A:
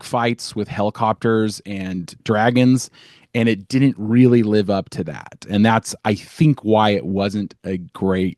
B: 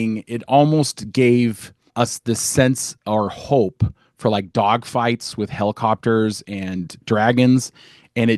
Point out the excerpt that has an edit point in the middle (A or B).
B